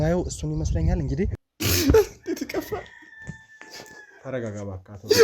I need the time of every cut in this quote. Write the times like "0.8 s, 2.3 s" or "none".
1.4 s